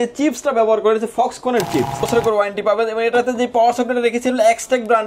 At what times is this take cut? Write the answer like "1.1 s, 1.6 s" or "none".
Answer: 2.1 s